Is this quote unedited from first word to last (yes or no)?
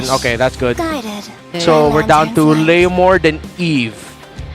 yes